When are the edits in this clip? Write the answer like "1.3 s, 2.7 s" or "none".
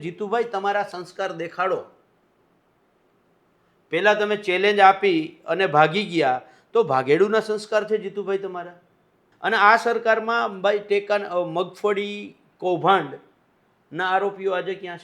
9.3 s